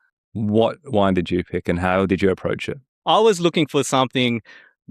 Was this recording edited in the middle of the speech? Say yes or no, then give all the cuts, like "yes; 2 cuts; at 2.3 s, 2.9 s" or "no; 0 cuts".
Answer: yes; 1 cut; at 2.9 s